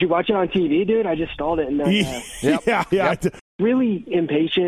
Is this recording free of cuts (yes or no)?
no